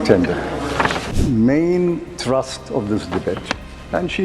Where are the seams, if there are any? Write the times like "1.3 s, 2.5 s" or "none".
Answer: 1.1 s

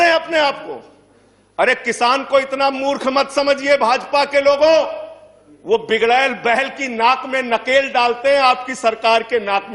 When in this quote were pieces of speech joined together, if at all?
none

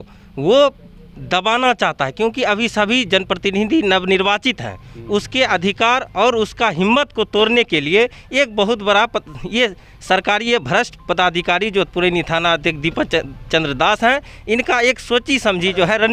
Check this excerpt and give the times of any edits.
none

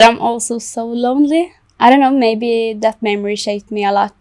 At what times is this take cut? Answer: 1.6 s

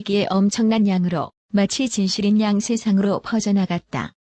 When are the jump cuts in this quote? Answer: 1.0 s

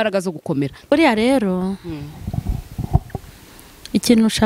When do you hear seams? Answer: 0.9 s

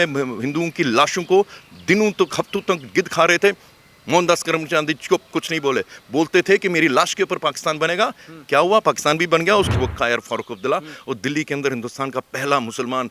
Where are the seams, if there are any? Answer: 9.7 s

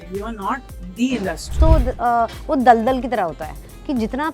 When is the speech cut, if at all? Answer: 1.5 s

